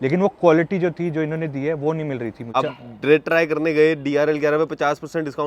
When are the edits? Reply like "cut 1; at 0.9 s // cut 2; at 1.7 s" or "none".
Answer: cut 1; at 2.4 s